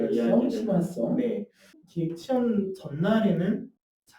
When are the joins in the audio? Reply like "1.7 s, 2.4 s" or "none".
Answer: 1.8 s